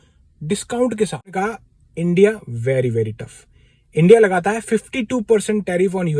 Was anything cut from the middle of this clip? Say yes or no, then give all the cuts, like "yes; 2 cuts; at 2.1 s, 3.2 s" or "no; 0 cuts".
yes; 1 cut; at 1.3 s